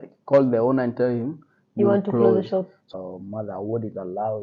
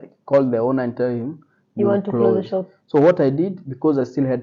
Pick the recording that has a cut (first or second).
first